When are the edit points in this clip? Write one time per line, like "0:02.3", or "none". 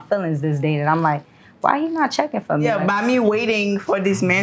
0:02.7